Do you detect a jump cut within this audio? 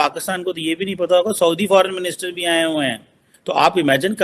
yes; 1 cut; at 3.3 s

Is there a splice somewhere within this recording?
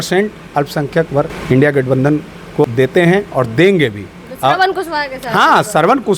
yes; 2 cuts; at 1.4 s, 2.6 s

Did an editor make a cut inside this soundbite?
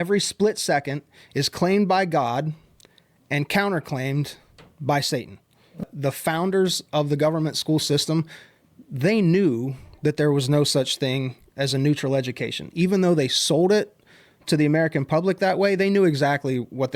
yes; 1 cut; at 5.9 s

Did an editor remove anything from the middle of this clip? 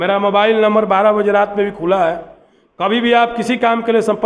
no; 0 cuts

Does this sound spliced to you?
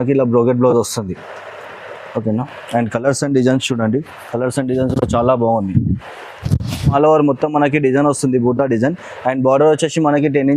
yes; 1 cut; at 6.9 s

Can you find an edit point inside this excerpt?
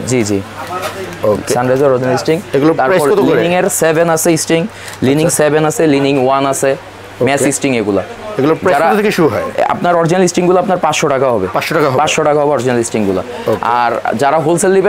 no; 0 cuts

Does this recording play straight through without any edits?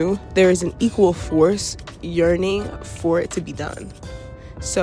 yes; 0 cuts

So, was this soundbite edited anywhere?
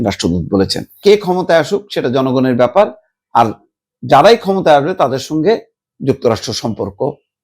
yes; 1 cut; at 1.0 s

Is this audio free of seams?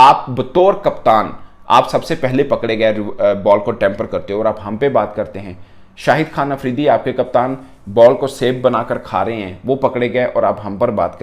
yes; 0 cuts

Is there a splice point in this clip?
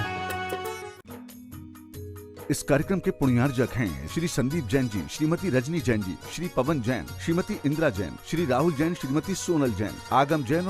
yes; 1 cut; at 1.0 s

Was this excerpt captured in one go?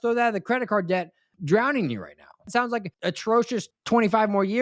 no; 3 cuts; at 1.3 s, 2.6 s, 3.7 s

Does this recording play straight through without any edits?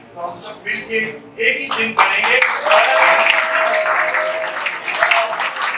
yes; 0 cuts

